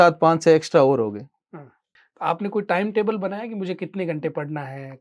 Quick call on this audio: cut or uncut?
uncut